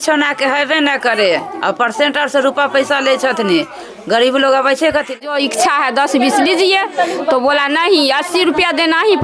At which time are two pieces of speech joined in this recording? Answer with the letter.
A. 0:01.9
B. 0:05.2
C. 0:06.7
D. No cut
B